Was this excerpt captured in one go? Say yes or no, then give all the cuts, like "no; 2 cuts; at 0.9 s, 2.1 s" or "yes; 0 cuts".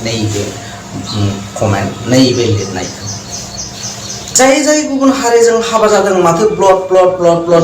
no; 1 cut; at 4.4 s